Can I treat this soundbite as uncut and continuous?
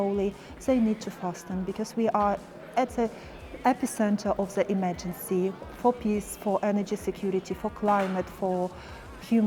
yes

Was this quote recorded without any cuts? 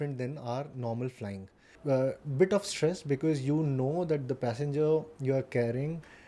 no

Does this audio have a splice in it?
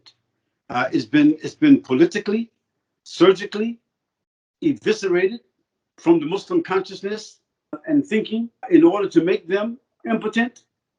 yes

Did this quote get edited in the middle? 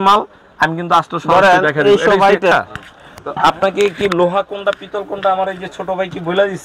yes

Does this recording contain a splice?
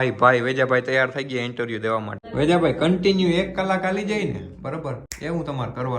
yes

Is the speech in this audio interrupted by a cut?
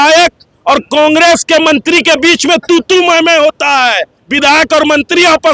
yes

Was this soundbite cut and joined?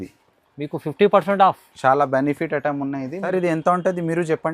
yes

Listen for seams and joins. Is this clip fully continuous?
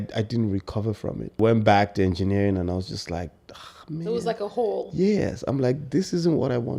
no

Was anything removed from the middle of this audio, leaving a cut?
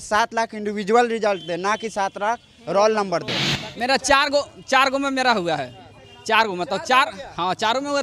yes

